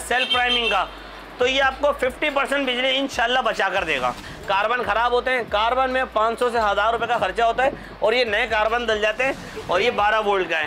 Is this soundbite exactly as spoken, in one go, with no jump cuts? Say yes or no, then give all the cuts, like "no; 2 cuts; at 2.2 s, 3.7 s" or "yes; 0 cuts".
no; 2 cuts; at 4.2 s, 9.5 s